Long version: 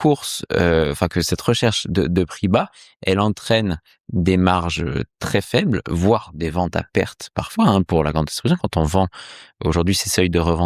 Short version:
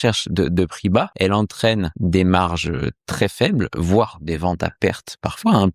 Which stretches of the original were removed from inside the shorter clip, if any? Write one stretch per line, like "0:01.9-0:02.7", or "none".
0:02.7-0:03.0
0:03.8-0:04.1